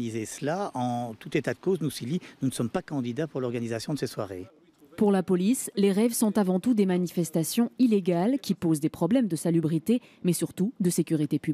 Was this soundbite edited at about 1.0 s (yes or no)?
no